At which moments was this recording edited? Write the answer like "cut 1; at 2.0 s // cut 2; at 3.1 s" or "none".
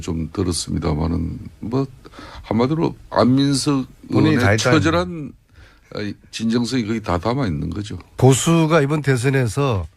none